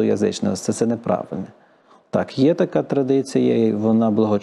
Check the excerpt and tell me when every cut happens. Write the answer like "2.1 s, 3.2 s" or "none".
none